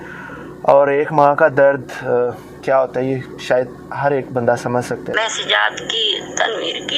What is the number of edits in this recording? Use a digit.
1